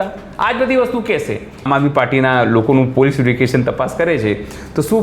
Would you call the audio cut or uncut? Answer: cut